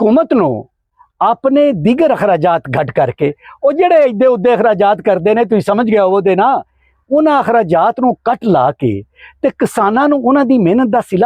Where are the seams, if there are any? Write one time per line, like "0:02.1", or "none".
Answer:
none